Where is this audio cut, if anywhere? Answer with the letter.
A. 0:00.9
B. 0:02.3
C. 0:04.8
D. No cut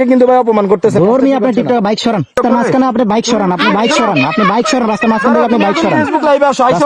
B